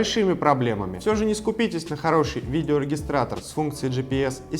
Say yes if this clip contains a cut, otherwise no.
yes